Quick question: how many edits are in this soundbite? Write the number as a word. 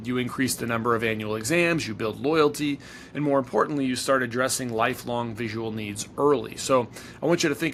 zero